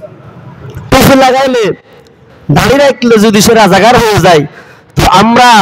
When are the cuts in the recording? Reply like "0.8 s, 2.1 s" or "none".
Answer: none